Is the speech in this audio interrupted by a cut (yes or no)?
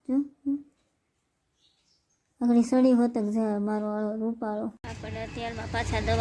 yes